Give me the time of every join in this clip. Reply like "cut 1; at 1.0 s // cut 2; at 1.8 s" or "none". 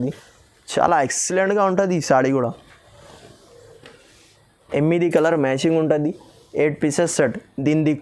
none